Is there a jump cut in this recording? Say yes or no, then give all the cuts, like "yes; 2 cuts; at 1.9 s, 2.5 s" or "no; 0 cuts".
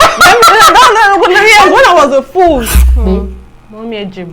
yes; 1 cut; at 2.8 s